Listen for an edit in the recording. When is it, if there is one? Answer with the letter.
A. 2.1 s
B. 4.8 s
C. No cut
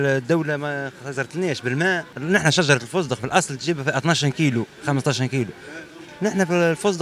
A